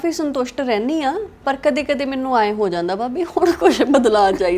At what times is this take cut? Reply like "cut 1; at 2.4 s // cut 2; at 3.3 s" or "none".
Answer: none

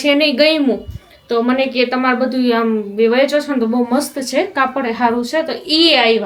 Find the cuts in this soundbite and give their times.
none

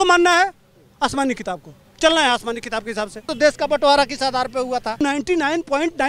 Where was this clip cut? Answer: cut 1; at 3.3 s // cut 2; at 5.0 s

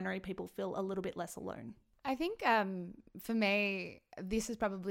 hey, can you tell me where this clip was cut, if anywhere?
none

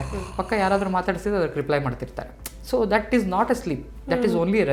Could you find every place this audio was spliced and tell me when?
none

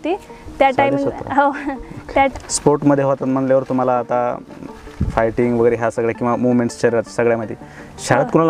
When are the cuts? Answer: cut 1; at 2.3 s

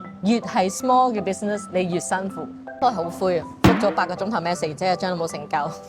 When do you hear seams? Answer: cut 1; at 2.6 s

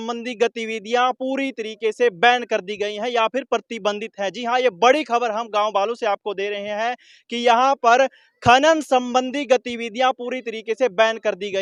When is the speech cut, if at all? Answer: none

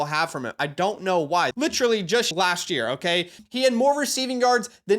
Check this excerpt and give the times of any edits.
cut 1; at 1.5 s // cut 2; at 2.3 s // cut 3; at 3.4 s

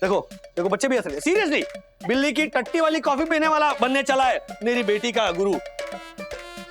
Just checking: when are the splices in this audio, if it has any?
none

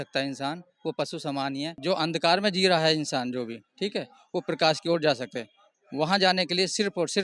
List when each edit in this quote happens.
cut 1; at 1.8 s

